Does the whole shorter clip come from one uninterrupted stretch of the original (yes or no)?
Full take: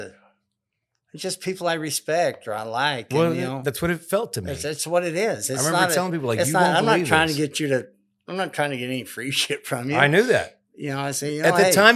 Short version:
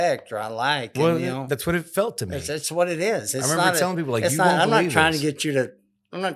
yes